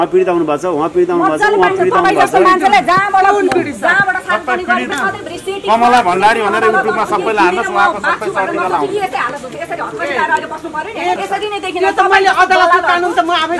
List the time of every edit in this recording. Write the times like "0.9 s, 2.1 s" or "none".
4.9 s, 11.2 s